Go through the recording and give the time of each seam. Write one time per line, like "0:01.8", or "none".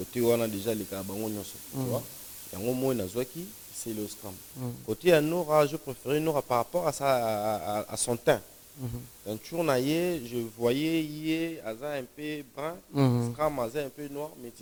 none